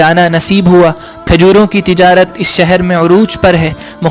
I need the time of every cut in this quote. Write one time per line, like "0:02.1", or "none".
0:01.1